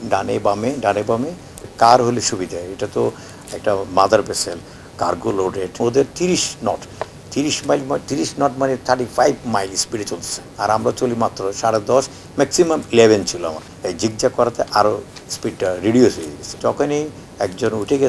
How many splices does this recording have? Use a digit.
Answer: 4